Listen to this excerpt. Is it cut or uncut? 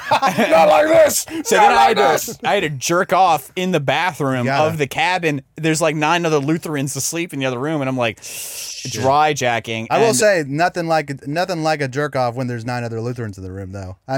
uncut